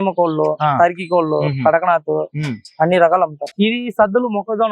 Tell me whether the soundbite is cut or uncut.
cut